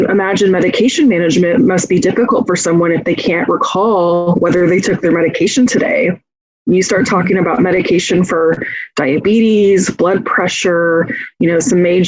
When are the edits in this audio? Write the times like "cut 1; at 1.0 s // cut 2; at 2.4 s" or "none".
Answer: none